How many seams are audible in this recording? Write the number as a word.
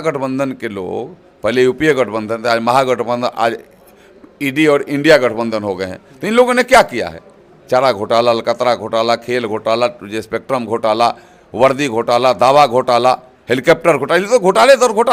zero